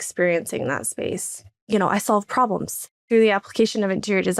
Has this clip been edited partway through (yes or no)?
yes